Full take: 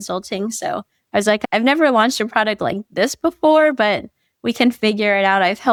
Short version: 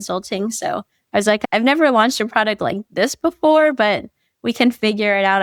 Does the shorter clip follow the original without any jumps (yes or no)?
yes